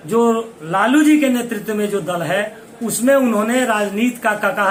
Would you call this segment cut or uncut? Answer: uncut